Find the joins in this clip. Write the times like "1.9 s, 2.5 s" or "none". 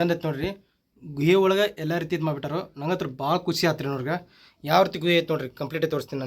none